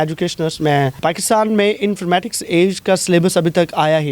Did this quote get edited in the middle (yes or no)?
yes